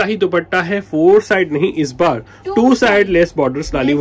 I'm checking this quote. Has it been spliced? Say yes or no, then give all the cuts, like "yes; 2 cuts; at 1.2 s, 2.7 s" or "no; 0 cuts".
no; 0 cuts